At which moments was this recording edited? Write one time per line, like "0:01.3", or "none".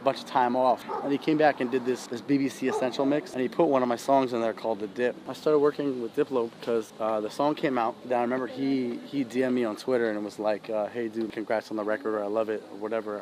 0:00.9
0:02.1
0:03.3
0:05.3
0:08.0
0:11.3